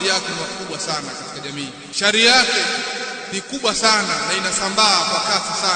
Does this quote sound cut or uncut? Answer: cut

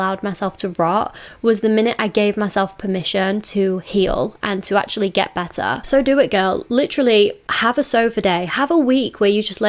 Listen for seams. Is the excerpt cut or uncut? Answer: uncut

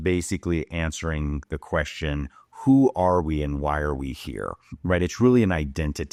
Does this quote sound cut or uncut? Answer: uncut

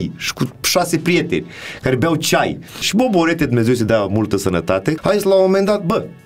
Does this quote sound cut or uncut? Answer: cut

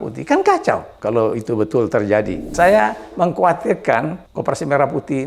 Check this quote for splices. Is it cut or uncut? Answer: cut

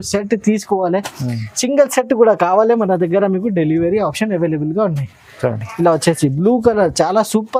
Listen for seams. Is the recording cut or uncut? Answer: uncut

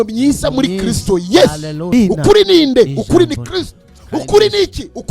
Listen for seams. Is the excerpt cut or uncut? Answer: cut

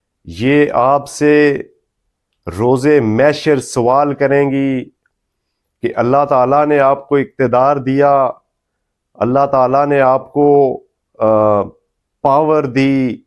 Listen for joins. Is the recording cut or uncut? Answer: uncut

